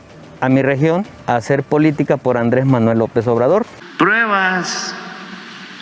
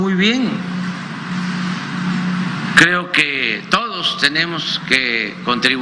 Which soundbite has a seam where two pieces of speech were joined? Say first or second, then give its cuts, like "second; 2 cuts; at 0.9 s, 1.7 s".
first; 1 cut; at 3.8 s